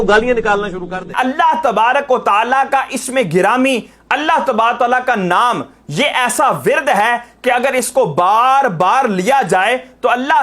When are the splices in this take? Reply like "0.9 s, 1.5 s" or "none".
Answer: 1.1 s